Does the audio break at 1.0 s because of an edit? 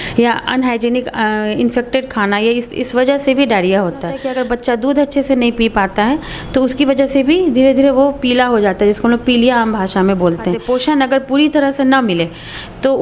no; 2 cuts; at 4.2 s, 10.6 s

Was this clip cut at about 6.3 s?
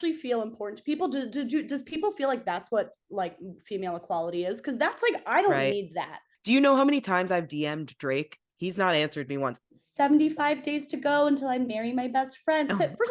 yes; 2 cuts; at 6.3 s, 9.6 s

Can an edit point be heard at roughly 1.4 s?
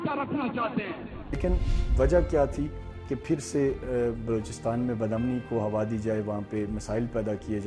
yes; 1 cut; at 1.4 s

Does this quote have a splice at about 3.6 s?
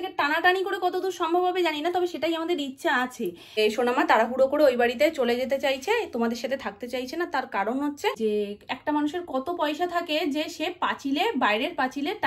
yes; 2 cuts; at 3.6 s, 8.2 s

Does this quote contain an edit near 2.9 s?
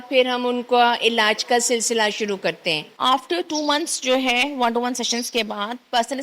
yes; 1 cut; at 2.9 s

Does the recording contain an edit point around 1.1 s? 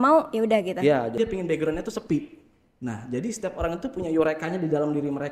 yes; 1 cut; at 1.1 s

